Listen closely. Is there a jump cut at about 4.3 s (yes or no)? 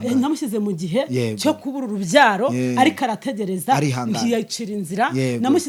no